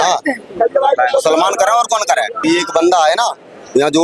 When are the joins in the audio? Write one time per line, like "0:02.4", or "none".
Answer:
0:02.4